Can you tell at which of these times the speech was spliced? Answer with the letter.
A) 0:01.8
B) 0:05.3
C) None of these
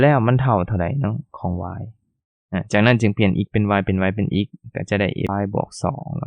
B